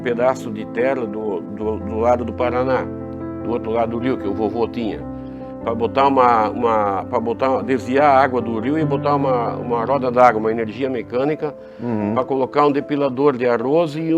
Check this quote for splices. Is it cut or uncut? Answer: uncut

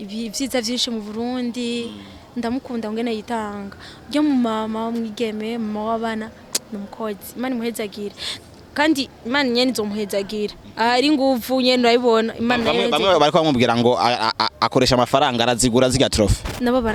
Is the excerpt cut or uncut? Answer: uncut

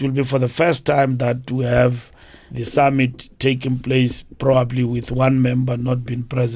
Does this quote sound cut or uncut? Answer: uncut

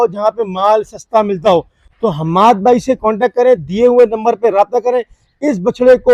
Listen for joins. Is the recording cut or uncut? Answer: uncut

